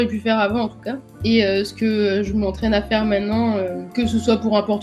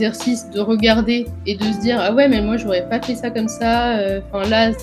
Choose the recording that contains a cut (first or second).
first